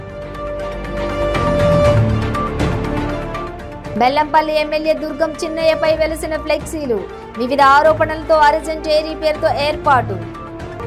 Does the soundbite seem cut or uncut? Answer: cut